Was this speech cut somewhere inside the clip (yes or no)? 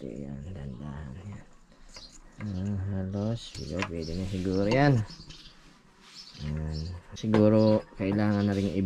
yes